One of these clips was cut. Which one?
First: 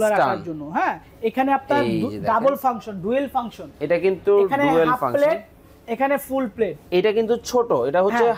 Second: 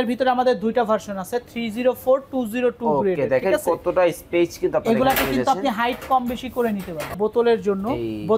second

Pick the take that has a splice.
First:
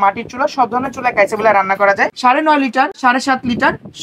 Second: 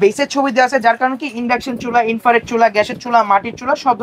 first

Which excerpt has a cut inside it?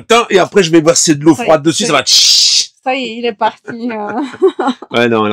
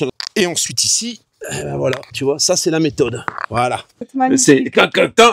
second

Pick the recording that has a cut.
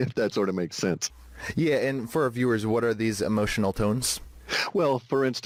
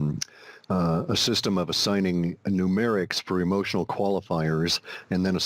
second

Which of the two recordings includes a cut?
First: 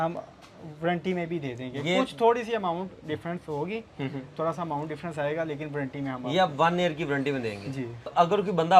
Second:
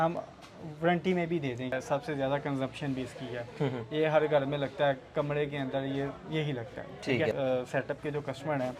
second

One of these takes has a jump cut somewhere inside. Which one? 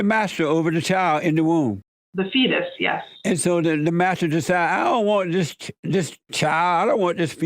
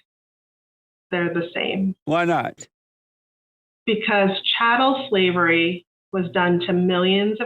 first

